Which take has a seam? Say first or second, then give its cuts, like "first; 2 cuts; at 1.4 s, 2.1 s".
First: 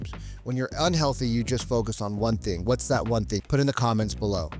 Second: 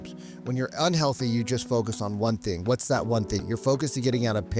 second; 1 cut; at 3.4 s